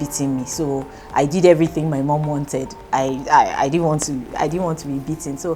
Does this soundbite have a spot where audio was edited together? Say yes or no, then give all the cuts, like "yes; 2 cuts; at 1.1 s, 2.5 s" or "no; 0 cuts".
no; 0 cuts